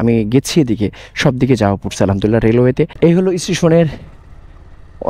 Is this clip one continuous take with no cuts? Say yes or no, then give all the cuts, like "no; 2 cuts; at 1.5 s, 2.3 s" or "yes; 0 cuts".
no; 1 cut; at 2.9 s